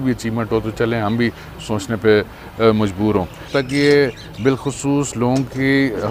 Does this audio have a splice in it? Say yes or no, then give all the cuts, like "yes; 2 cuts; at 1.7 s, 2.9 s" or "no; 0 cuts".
yes; 1 cut; at 3.5 s